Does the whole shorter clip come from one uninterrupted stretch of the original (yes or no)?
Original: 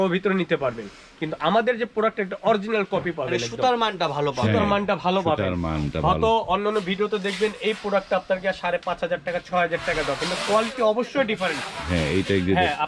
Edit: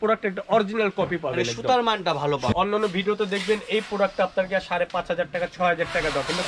no